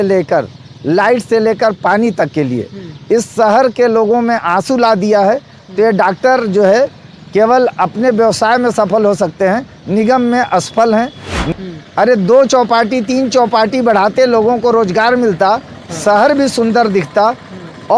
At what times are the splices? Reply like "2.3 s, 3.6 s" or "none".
11.4 s